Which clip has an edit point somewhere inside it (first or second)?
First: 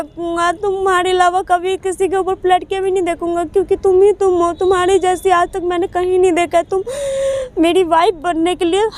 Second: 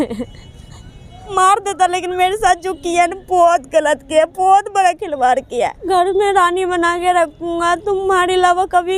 second